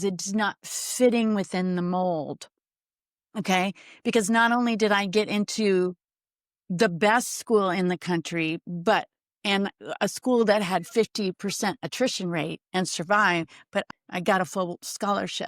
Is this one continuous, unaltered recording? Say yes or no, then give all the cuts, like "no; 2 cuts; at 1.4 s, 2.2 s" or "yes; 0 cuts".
no; 1 cut; at 13.9 s